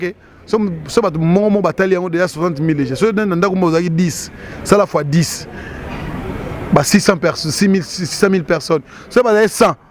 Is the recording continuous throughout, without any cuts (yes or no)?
yes